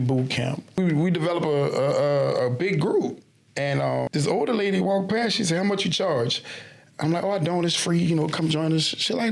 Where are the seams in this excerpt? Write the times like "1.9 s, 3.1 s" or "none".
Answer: 0.8 s, 4.1 s

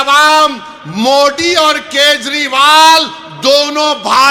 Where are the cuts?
none

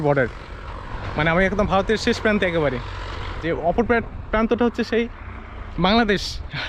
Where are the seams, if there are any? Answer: 3.4 s

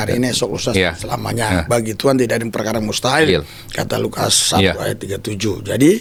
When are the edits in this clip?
none

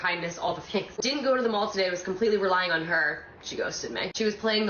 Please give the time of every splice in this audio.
1.0 s

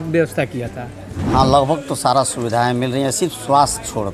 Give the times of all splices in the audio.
1.1 s

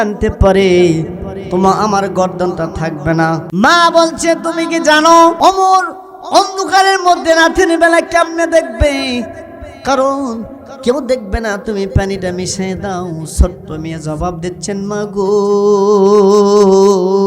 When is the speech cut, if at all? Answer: 3.5 s, 5.4 s

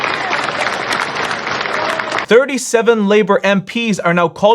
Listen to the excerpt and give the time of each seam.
2.2 s

